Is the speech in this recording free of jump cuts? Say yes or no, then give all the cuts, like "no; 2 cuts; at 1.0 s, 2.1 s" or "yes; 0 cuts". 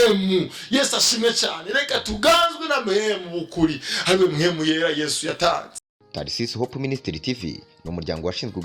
no; 1 cut; at 6.0 s